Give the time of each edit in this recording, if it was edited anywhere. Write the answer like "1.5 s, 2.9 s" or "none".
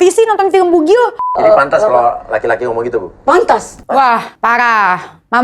1.3 s, 4.3 s